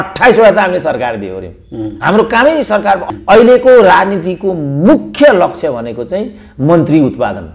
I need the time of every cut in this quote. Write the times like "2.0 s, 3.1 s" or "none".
3.0 s